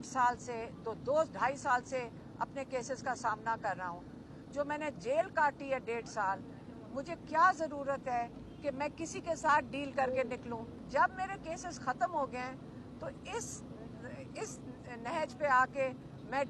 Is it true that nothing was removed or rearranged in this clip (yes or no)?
no